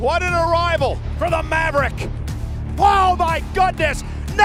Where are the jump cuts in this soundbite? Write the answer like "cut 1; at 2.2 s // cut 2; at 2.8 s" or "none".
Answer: none